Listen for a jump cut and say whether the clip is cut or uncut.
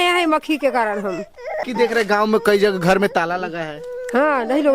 cut